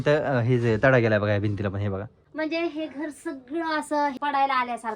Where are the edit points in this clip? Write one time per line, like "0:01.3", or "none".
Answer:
0:02.2
0:04.1

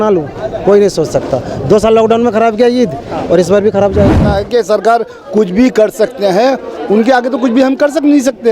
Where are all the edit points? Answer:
0:04.3

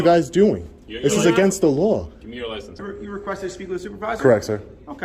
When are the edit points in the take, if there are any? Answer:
0:02.9

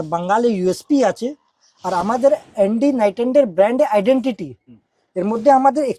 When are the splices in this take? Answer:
none

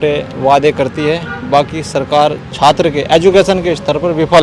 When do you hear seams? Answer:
none

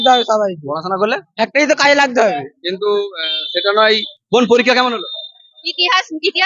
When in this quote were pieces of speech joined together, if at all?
0:04.1

